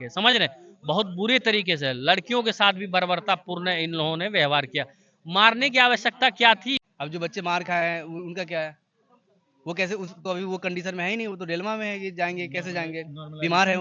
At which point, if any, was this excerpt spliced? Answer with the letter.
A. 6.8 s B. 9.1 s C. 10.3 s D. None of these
A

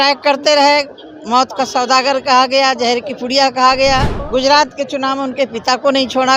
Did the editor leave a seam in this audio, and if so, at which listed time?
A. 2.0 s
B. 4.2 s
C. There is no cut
B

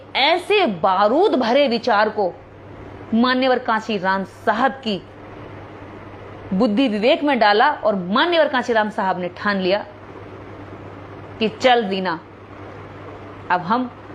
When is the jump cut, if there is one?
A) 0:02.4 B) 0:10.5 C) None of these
C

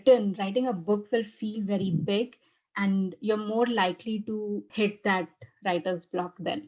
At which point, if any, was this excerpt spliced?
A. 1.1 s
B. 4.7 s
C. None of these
B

